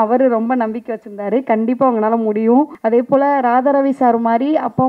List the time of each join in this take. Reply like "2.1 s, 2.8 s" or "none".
2.8 s

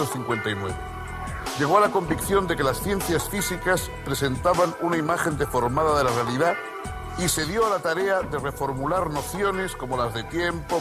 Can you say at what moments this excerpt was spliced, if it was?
none

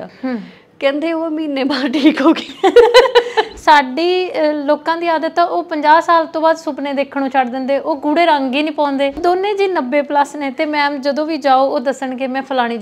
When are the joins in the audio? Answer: 3.5 s, 9.2 s

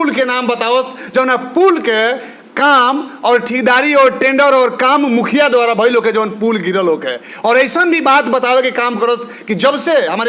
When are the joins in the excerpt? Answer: none

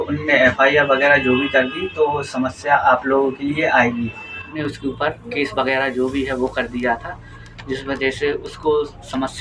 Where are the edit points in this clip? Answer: 4.6 s

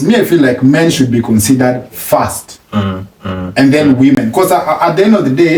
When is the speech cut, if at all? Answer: none

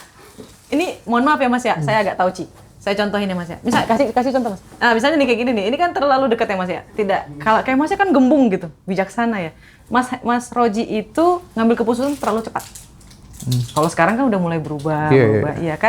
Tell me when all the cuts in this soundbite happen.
none

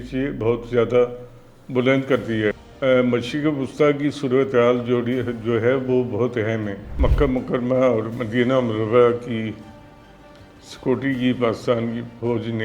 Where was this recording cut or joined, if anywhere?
2.7 s, 6.9 s

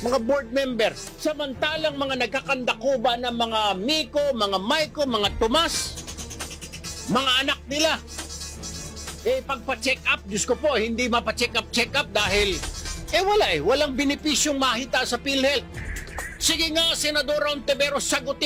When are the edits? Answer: none

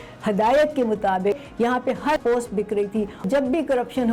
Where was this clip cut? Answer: 3.2 s

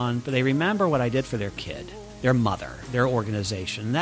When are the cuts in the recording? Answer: 2.2 s, 2.8 s

